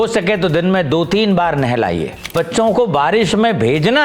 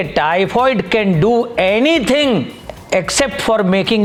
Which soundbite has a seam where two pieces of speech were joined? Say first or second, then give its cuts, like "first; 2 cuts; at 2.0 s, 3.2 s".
first; 1 cut; at 2.3 s